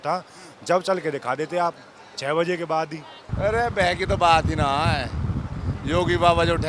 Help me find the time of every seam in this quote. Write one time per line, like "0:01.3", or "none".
0:03.2